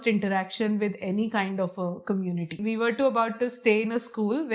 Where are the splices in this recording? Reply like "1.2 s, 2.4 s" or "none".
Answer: 2.6 s